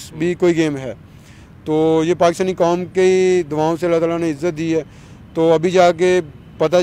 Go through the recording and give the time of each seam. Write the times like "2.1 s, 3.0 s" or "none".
none